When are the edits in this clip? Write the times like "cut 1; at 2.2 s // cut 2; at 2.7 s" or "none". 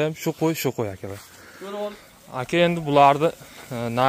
cut 1; at 1.9 s